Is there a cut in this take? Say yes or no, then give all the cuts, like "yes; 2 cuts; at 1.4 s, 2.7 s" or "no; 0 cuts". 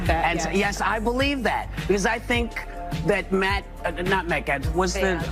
no; 0 cuts